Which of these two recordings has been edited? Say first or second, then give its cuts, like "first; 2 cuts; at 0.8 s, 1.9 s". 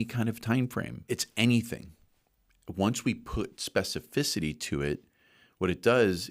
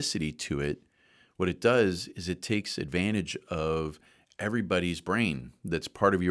first; 1 cut; at 1.0 s